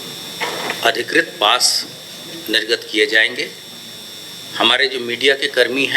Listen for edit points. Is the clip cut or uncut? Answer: uncut